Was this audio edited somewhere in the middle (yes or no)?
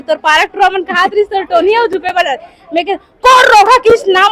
no